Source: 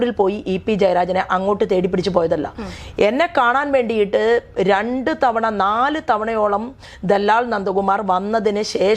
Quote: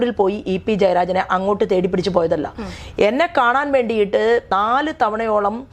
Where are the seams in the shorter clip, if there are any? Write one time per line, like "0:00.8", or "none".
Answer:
0:04.5